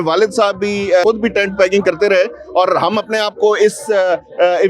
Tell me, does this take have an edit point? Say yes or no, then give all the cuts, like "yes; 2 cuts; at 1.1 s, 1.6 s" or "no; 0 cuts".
yes; 1 cut; at 1.0 s